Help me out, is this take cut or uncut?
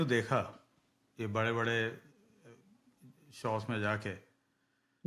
uncut